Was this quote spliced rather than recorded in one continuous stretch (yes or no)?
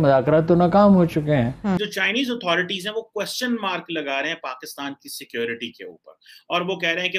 yes